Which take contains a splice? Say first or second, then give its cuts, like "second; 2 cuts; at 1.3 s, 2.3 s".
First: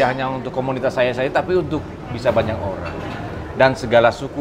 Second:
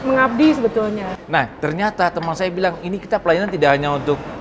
second; 1 cut; at 1.1 s